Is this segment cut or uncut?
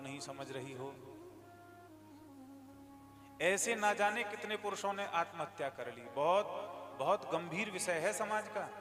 uncut